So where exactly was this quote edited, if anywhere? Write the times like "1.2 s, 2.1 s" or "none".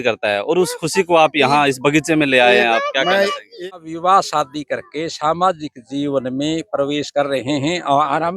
3.5 s